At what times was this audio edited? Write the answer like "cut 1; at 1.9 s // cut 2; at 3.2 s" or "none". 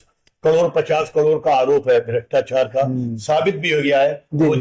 none